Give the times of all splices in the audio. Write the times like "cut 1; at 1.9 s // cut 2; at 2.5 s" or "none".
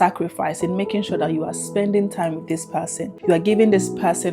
cut 1; at 3.1 s